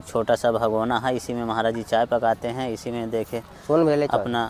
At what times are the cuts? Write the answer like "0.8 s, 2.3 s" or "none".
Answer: none